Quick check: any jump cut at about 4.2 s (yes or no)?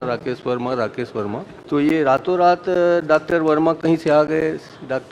no